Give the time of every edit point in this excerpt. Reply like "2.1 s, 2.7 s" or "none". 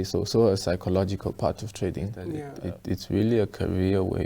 2.5 s